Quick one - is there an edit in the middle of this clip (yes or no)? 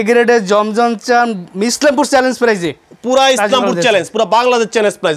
no